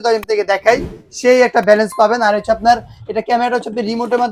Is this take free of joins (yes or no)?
yes